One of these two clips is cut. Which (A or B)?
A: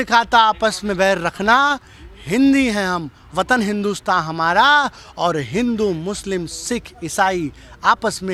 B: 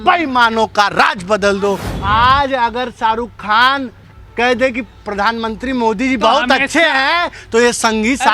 B